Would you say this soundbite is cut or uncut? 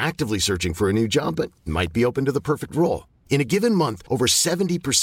uncut